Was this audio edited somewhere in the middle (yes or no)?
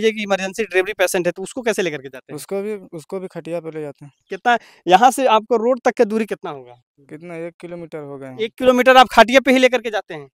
no